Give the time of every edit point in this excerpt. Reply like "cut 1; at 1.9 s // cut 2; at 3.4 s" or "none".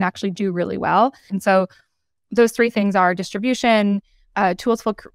cut 1; at 1.3 s